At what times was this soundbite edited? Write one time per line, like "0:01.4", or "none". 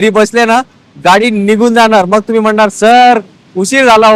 none